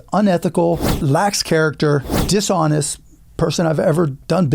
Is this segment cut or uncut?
cut